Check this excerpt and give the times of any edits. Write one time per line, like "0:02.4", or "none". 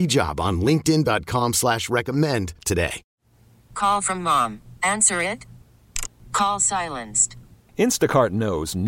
0:03.0